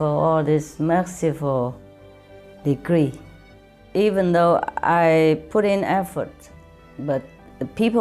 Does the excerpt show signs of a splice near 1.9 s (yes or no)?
no